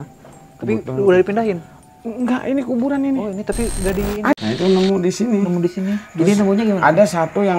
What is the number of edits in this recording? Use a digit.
1